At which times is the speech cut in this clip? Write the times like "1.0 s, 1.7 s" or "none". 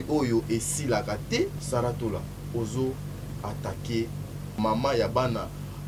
1.6 s, 4.5 s